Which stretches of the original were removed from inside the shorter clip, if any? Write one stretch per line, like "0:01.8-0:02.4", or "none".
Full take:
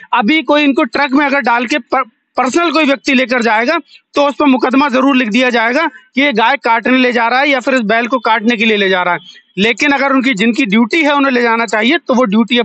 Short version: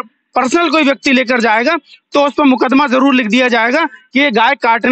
none